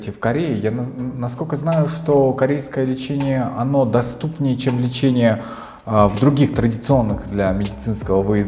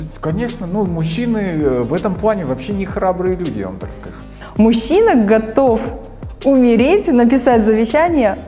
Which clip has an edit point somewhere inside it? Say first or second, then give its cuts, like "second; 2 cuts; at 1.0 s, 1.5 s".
second; 1 cut; at 4.4 s